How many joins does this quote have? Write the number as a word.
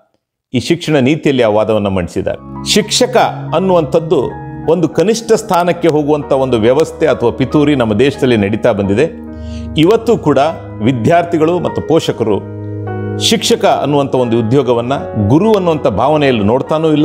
one